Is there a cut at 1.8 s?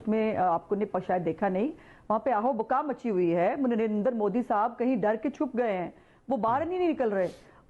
no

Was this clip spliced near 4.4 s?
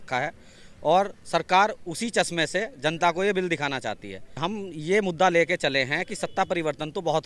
yes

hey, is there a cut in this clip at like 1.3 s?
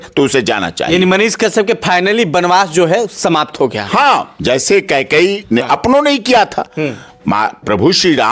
no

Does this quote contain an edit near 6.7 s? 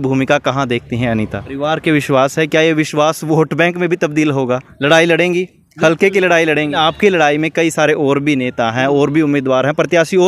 yes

